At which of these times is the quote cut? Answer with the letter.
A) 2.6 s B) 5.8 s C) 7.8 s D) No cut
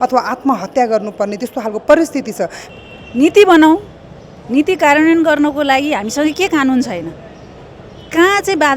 A